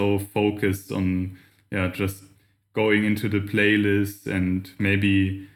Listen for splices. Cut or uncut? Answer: uncut